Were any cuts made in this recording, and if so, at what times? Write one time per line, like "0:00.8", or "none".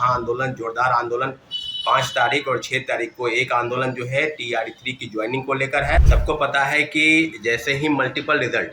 0:06.0